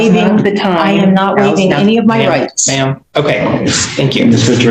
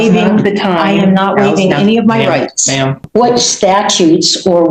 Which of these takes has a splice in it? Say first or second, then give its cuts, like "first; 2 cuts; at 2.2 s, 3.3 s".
second; 1 cut; at 3.0 s